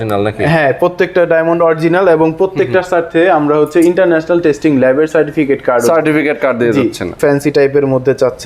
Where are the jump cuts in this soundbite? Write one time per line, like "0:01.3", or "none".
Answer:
0:07.1